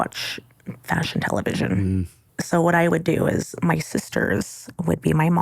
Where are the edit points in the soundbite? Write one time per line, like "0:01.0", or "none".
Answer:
0:02.2